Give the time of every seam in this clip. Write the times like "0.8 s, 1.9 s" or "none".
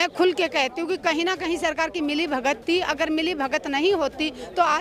none